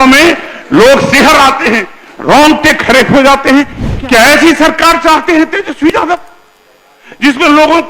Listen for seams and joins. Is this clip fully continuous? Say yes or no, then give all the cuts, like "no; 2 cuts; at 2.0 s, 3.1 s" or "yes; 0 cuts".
no; 1 cut; at 3.8 s